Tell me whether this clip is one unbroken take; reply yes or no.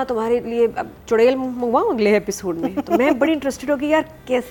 yes